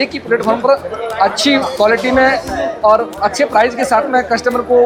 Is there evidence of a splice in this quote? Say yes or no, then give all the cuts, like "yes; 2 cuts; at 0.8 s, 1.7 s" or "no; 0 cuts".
no; 0 cuts